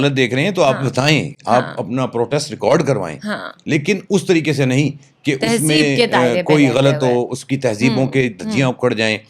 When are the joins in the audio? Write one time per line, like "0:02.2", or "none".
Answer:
none